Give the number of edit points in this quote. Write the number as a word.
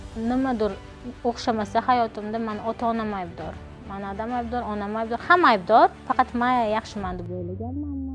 zero